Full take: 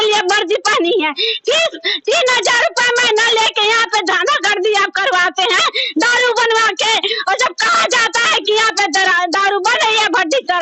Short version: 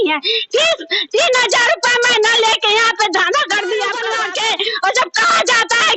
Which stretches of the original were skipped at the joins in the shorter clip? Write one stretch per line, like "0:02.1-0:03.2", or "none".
0:05.0-0:06.5